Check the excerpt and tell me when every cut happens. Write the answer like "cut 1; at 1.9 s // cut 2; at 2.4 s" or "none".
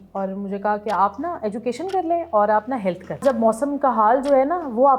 cut 1; at 3.2 s